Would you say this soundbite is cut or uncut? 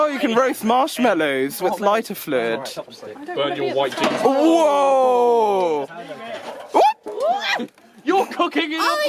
uncut